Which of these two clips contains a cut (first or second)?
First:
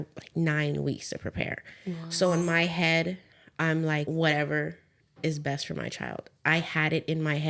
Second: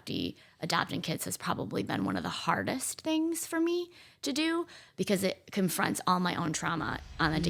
first